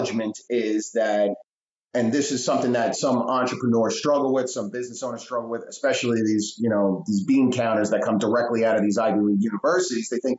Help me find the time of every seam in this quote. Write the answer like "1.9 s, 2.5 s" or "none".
none

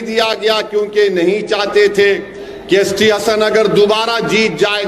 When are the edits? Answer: none

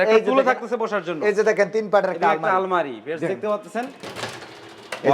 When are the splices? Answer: none

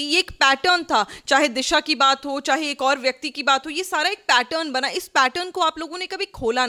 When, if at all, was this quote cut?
none

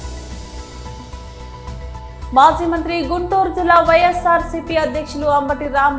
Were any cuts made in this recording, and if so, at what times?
1.1 s, 2.3 s

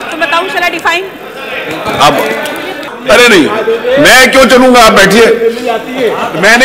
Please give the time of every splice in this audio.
2.9 s

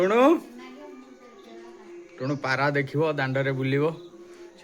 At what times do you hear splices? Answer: none

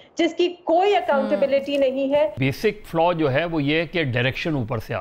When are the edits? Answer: 2.4 s

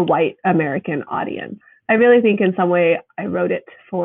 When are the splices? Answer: 1.6 s

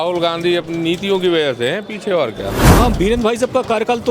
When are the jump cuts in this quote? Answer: 2.6 s

